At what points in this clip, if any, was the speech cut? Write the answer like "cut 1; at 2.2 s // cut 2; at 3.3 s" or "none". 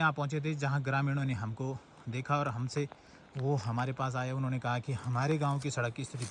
none